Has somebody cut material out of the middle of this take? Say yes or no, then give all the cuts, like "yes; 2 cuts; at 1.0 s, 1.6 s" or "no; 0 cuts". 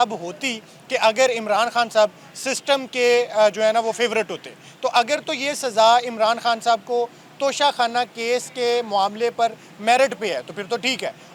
no; 0 cuts